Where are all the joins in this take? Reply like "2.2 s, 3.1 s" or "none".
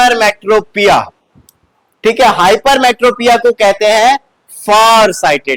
none